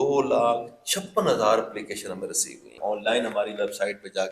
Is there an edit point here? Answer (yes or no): yes